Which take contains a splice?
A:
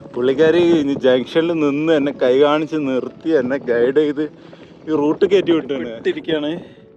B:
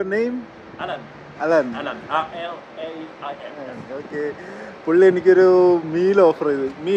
A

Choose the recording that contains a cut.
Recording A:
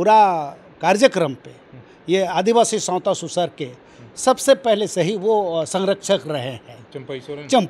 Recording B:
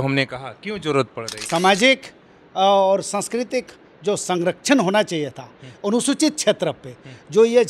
B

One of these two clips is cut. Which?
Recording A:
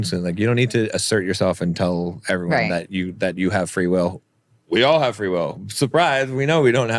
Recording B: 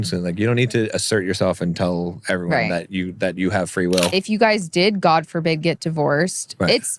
B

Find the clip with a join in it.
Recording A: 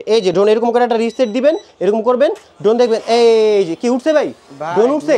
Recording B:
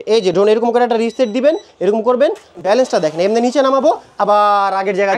B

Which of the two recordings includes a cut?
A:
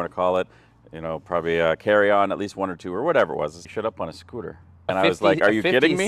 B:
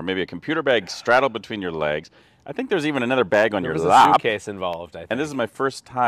A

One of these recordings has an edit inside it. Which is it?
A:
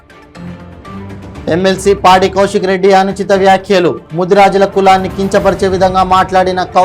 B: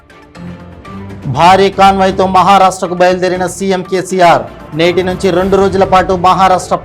B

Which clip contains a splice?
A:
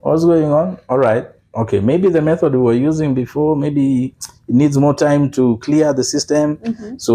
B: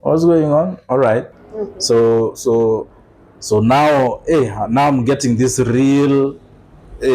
B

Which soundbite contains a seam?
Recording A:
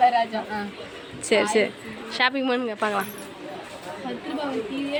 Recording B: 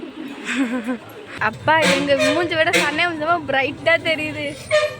B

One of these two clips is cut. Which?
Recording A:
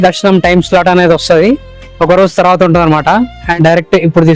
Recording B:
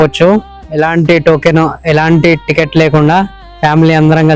A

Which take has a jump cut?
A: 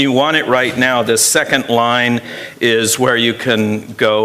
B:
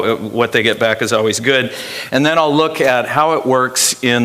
B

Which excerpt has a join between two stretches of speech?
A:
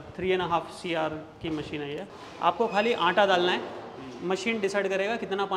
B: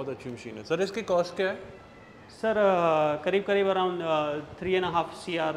A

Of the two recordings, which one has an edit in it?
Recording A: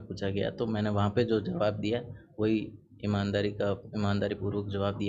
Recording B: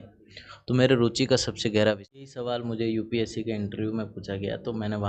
B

